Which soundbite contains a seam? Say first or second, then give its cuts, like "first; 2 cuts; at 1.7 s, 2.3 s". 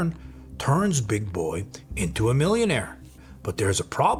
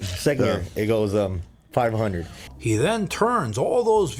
second; 1 cut; at 2.5 s